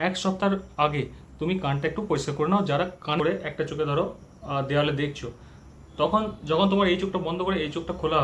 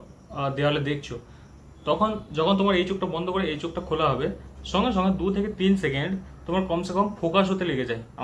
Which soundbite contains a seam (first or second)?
first